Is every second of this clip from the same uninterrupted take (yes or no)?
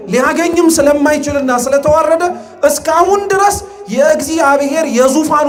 yes